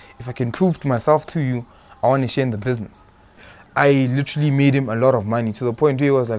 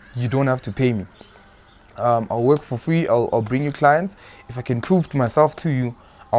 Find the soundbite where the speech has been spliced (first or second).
first